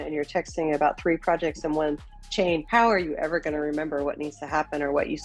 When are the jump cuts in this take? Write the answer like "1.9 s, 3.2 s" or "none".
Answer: 2.6 s